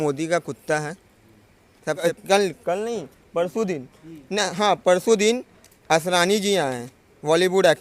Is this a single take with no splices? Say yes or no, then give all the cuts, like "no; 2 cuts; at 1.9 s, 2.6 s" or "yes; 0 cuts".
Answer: no; 1 cut; at 2.0 s